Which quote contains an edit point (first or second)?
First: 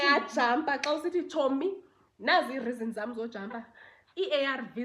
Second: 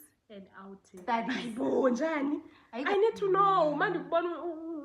second